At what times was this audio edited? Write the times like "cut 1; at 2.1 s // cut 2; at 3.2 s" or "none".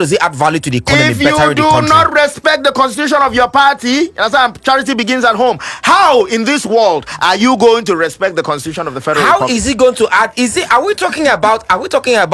none